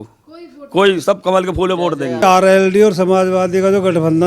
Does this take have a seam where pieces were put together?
yes; 1 cut; at 2.2 s

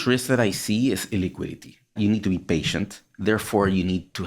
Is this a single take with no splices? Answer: no; 1 cut; at 2.0 s

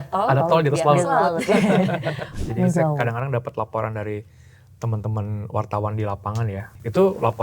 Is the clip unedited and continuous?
no; 1 cut; at 2.4 s

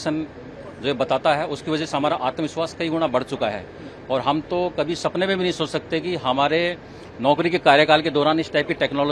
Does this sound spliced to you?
no; 0 cuts

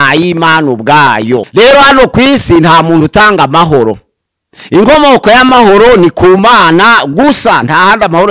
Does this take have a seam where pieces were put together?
yes; 1 cut; at 1.5 s

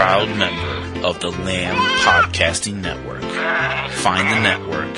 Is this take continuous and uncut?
yes; 0 cuts

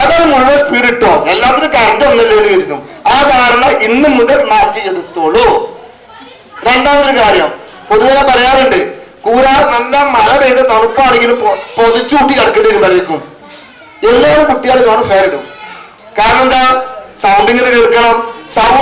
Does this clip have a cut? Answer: no; 0 cuts

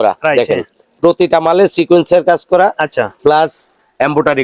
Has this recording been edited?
no; 0 cuts

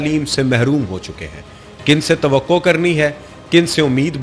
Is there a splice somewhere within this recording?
no; 0 cuts

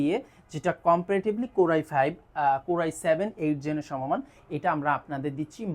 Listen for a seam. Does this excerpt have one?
no; 0 cuts

